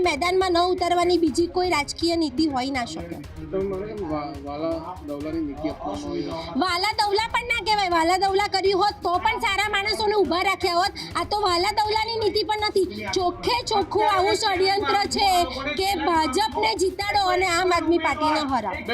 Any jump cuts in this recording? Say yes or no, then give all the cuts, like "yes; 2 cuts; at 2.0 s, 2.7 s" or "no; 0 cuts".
no; 0 cuts